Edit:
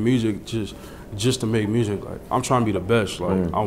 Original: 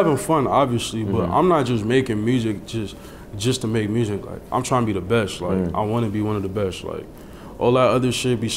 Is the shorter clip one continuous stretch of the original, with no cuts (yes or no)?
yes